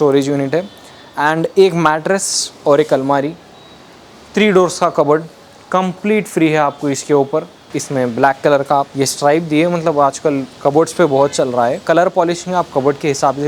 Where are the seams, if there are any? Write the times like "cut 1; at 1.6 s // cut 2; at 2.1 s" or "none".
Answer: cut 1; at 7.7 s // cut 2; at 8.9 s // cut 3; at 11.8 s